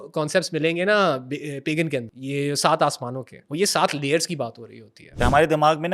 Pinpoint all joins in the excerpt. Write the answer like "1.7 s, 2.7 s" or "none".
2.1 s, 3.3 s, 5.1 s